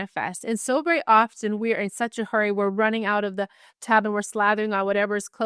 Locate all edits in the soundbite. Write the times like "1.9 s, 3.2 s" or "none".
none